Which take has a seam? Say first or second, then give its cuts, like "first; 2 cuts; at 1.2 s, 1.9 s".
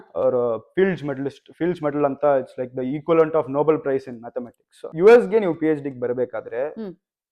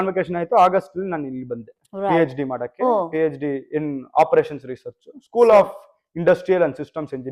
first; 1 cut; at 4.8 s